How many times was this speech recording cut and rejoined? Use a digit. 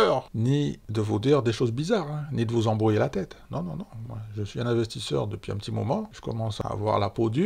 1